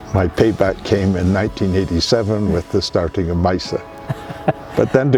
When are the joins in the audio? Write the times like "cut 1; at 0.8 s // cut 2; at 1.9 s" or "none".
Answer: none